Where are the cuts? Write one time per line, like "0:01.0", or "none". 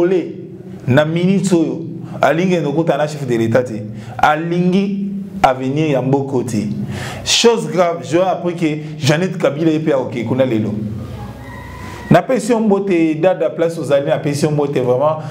none